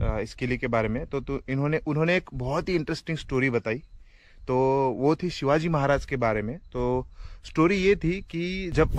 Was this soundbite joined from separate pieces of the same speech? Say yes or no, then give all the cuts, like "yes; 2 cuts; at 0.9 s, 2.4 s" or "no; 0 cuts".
no; 0 cuts